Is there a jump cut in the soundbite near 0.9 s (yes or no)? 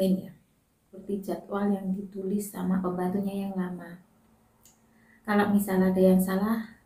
yes